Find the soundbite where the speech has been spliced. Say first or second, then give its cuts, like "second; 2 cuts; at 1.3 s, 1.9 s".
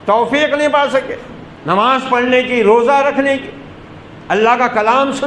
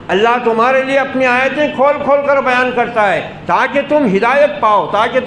first; 1 cut; at 1.1 s